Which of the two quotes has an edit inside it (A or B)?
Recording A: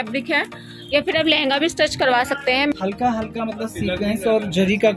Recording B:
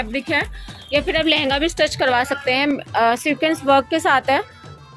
A